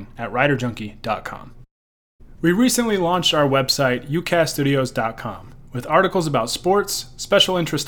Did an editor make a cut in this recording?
no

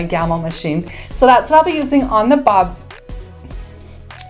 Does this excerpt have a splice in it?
no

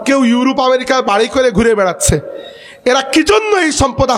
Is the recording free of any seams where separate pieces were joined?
yes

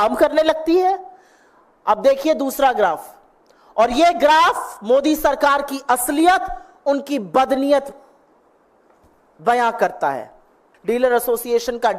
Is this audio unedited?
no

